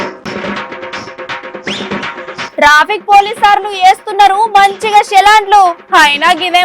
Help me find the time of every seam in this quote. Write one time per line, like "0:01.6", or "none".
none